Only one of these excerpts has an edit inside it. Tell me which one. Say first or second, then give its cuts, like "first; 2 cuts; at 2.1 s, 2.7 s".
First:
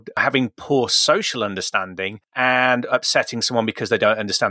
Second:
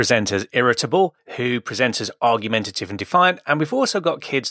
second; 1 cut; at 1.3 s